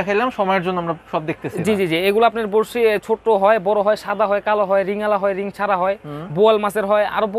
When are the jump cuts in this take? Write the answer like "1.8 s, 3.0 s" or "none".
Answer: none